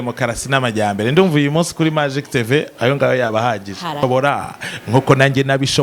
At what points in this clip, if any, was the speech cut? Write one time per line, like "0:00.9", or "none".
0:04.0